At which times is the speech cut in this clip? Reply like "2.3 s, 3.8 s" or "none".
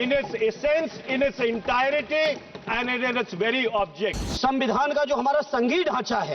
4.2 s